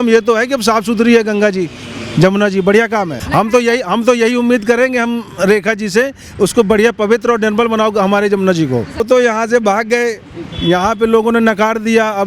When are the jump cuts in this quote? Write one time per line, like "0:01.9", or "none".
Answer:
0:03.2
0:09.0